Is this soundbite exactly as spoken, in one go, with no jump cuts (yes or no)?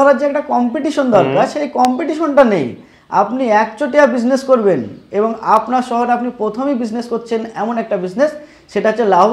yes